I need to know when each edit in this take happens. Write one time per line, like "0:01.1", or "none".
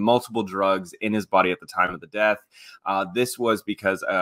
none